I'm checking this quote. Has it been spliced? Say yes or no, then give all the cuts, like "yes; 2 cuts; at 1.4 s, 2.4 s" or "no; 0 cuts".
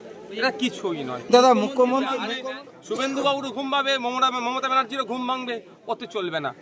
yes; 1 cut; at 2.2 s